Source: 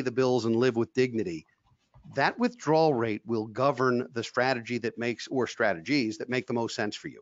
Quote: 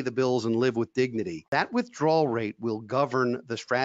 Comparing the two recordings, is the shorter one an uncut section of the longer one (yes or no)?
no